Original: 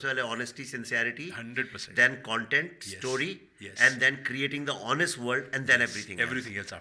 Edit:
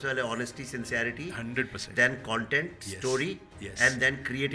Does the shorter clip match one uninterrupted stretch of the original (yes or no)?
yes